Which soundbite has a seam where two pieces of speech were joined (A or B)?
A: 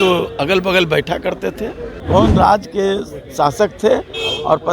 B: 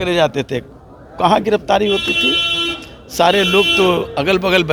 A